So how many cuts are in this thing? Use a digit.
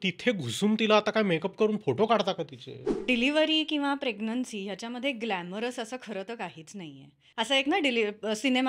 2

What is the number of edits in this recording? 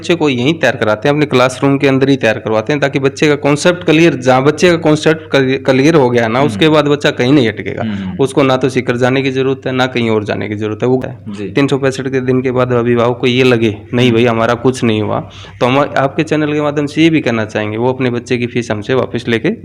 1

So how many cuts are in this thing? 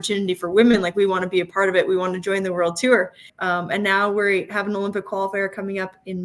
1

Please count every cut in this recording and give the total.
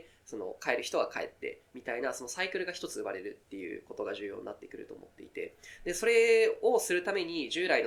0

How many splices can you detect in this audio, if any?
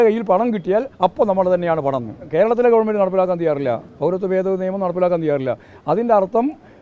1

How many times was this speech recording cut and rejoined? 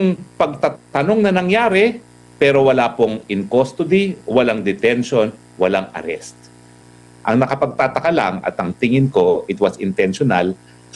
1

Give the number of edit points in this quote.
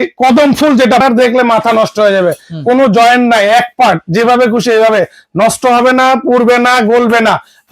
1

